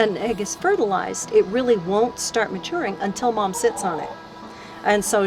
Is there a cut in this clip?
no; 0 cuts

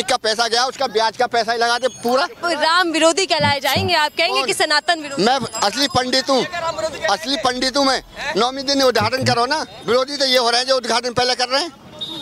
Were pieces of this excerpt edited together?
yes; 2 cuts; at 2.4 s, 9.6 s

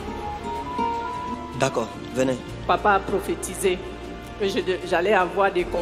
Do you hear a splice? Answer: yes; 1 cut; at 2.6 s

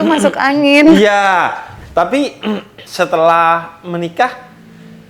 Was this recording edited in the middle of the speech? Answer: yes; 1 cut; at 1.7 s

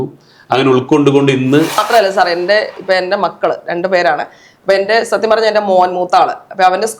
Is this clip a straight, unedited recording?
no; 1 cut; at 1.8 s

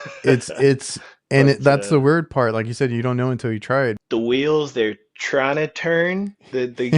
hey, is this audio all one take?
no; 1 cut; at 4.0 s

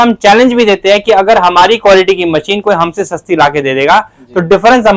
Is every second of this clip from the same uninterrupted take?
yes; 0 cuts

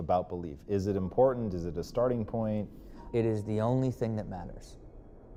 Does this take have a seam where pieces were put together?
no; 0 cuts

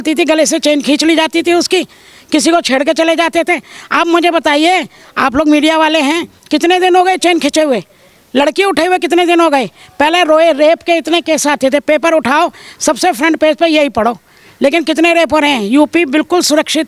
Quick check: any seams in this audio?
no; 0 cuts

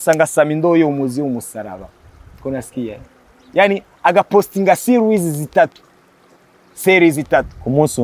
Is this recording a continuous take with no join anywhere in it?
yes; 0 cuts

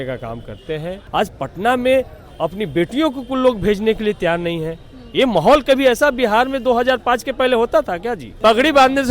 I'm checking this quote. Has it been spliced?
yes; 2 cuts; at 1.0 s, 8.3 s

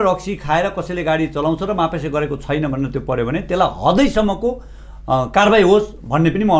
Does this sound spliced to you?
no; 0 cuts

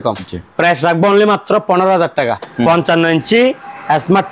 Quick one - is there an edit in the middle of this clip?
yes; 1 cut; at 2.4 s

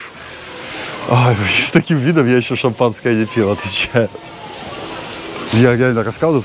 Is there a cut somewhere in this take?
yes; 1 cut; at 5.5 s

